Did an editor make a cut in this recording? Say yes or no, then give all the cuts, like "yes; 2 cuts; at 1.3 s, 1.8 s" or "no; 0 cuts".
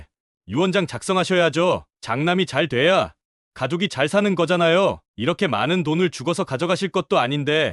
yes; 1 cut; at 2.0 s